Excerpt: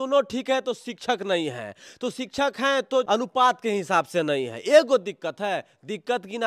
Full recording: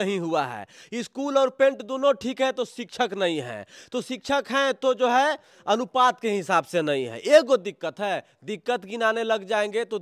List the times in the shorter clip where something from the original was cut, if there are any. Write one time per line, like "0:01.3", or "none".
0:03.1